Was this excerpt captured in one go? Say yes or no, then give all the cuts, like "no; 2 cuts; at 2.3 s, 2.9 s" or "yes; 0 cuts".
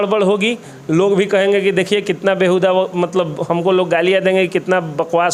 yes; 0 cuts